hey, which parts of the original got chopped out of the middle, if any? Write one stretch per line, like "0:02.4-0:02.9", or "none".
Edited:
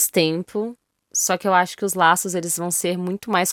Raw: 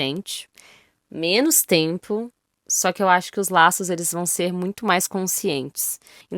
none